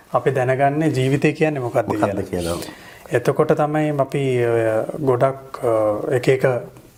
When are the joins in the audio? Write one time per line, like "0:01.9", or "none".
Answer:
none